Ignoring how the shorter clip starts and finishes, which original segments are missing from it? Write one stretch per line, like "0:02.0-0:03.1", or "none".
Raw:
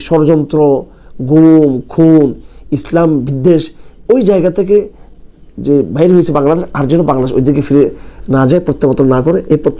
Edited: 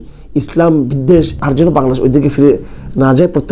0:03.8-0:06.7